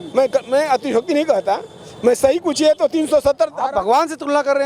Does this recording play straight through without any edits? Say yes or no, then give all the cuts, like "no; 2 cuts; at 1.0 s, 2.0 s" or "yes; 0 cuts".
yes; 0 cuts